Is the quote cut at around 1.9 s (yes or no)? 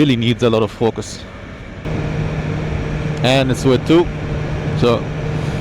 yes